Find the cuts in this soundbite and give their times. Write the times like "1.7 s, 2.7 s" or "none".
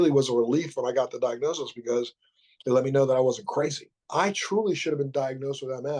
3.9 s

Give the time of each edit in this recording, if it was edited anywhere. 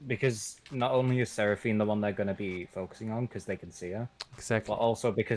none

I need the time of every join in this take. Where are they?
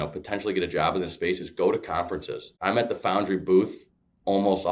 2.5 s

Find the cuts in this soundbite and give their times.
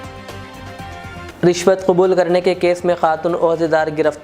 1.3 s

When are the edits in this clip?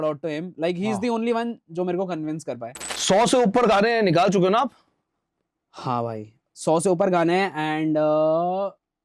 2.8 s

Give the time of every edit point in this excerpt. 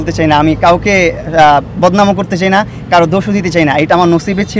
none

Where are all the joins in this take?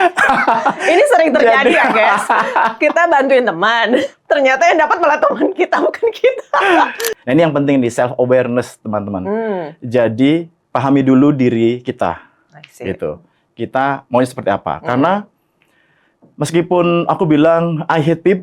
7.0 s

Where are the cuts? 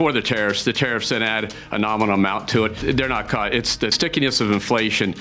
2.8 s, 3.9 s

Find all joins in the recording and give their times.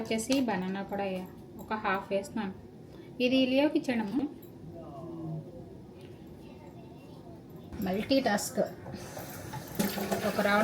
4.2 s, 7.7 s

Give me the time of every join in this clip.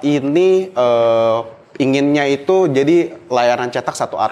none

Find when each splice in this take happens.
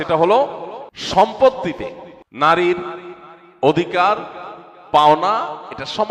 none

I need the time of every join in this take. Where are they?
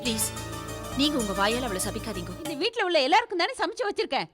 2.5 s

